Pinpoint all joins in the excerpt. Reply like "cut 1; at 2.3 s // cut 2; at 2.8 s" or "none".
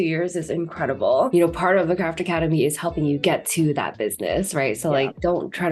cut 1; at 1.3 s